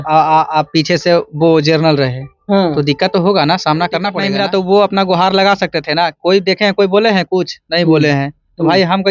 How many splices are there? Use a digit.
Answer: 1